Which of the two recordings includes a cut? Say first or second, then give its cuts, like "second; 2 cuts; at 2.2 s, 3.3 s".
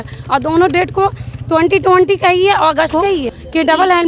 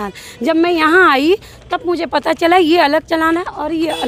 first; 1 cut; at 2.9 s